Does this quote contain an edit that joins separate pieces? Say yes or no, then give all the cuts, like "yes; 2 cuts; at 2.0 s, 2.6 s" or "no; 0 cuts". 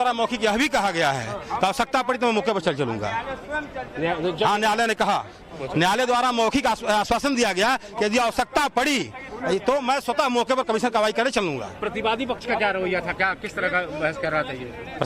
no; 0 cuts